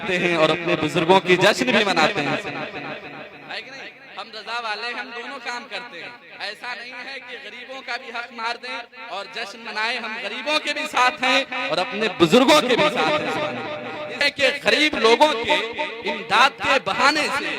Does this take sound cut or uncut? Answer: cut